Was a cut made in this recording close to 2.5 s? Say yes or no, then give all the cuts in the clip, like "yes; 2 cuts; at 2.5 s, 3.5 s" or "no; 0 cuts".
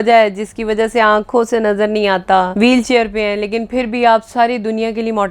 yes; 1 cut; at 2.5 s